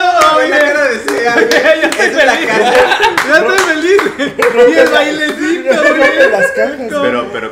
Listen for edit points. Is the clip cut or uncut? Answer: uncut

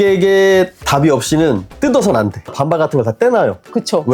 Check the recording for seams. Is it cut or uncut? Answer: cut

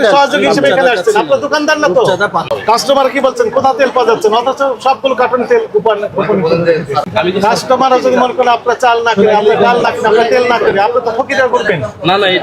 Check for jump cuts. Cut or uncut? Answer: cut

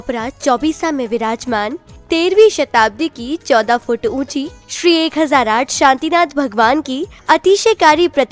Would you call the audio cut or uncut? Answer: uncut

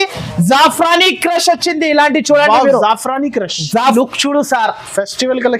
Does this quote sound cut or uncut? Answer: cut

